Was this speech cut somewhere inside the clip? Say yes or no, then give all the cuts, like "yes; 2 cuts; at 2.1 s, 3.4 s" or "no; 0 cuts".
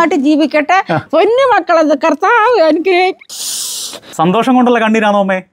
yes; 2 cuts; at 1.0 s, 4.1 s